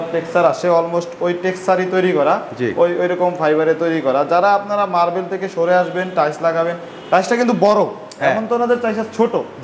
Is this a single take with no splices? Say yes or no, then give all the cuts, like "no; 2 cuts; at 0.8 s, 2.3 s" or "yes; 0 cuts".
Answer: yes; 0 cuts